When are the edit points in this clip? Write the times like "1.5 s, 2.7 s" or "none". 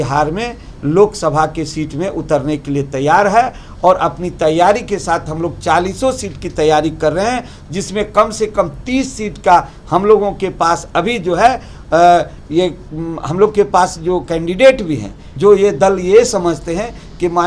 15.2 s